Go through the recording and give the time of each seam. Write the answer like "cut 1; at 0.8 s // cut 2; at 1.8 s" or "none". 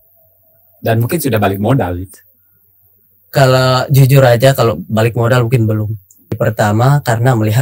cut 1; at 6.3 s